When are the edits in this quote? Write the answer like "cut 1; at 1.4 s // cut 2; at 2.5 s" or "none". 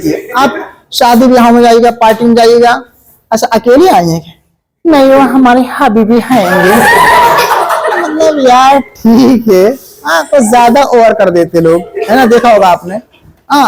none